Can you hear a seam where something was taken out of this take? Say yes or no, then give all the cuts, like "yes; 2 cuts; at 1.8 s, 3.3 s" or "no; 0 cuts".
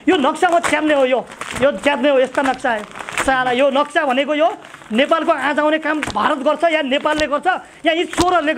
no; 0 cuts